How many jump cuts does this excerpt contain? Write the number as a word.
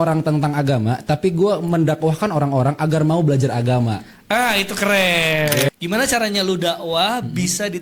one